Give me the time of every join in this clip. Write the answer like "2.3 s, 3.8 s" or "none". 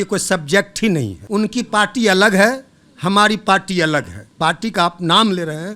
1.2 s, 4.2 s